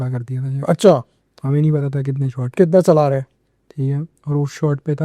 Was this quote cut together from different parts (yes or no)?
no